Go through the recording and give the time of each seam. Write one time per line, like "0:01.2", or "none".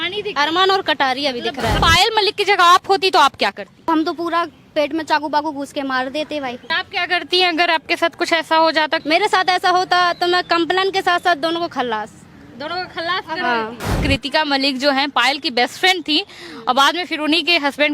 0:01.8
0:03.9
0:06.7
0:09.0
0:14.0